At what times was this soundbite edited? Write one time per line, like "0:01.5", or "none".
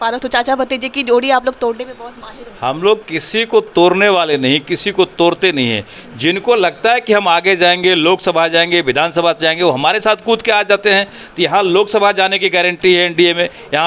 none